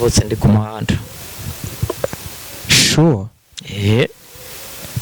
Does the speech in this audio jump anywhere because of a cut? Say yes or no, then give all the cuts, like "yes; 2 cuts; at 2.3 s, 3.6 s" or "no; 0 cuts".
no; 0 cuts